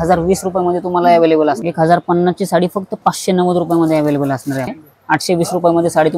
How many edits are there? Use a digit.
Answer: 2